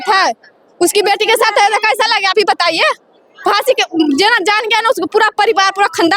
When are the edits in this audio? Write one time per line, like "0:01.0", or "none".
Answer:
none